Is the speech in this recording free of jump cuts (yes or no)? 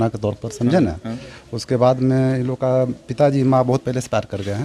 yes